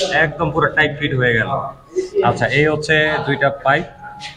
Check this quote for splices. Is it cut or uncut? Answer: uncut